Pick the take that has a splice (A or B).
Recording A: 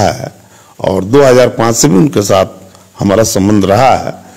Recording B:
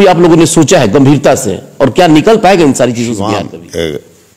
B